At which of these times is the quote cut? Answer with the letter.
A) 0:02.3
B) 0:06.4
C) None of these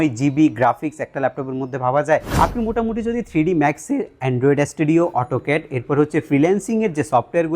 A